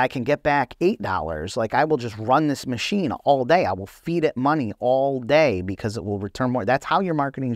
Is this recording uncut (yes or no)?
yes